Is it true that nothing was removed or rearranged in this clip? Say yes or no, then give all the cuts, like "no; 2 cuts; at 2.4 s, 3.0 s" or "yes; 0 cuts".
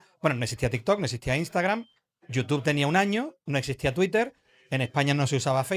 yes; 0 cuts